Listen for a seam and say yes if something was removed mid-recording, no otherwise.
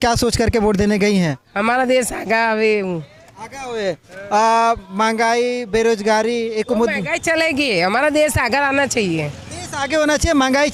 no